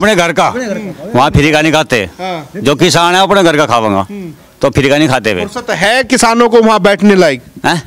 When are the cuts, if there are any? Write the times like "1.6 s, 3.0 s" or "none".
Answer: none